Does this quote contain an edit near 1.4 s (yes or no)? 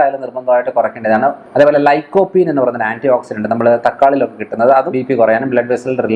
yes